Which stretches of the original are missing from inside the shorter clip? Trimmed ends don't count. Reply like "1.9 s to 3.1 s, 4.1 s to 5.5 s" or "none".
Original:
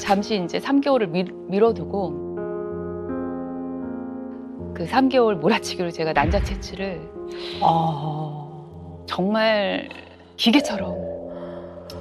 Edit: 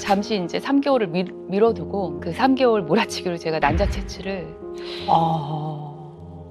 2.2 s to 4.7 s